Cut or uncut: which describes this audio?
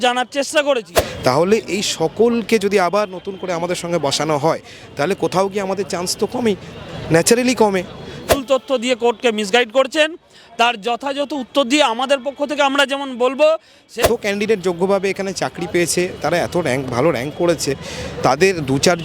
cut